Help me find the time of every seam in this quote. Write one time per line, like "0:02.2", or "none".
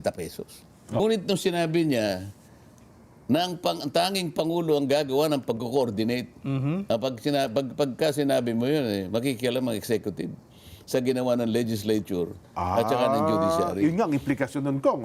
0:01.0